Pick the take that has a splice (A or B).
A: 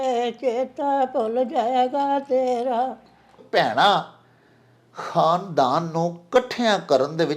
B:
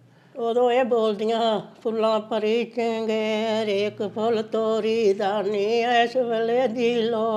A